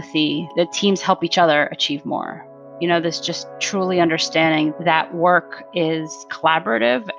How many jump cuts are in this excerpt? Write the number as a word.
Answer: zero